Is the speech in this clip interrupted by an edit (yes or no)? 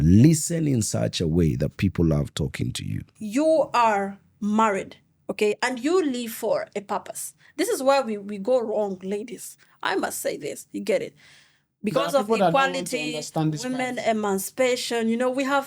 yes